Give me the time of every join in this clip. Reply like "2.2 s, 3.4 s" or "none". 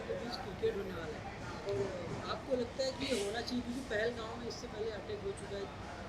none

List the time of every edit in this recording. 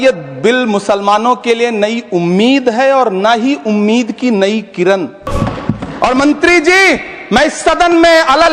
5.3 s

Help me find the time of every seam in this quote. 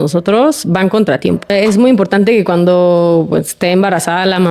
1.5 s

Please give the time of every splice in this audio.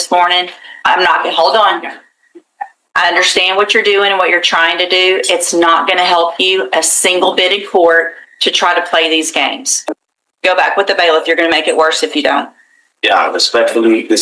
9.7 s

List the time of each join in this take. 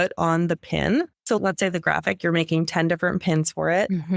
1.2 s

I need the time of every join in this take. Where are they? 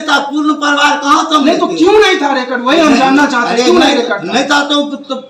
none

